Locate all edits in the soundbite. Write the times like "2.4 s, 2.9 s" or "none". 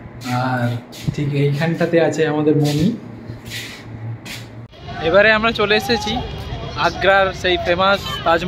4.7 s